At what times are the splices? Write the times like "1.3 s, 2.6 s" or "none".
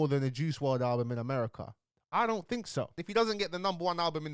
3.0 s